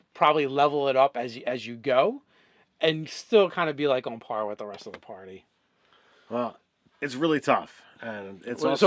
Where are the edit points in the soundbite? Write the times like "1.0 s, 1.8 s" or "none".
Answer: none